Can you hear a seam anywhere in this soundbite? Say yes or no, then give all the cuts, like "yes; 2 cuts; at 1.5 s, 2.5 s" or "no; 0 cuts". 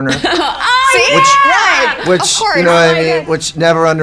no; 0 cuts